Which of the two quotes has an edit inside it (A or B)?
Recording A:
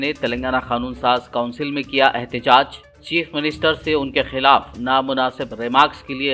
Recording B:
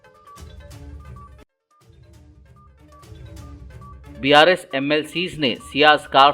B